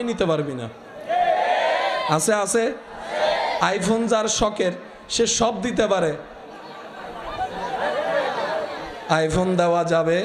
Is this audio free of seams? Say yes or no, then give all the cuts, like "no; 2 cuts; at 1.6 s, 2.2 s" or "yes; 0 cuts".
yes; 0 cuts